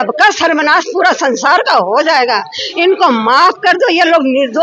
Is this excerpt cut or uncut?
uncut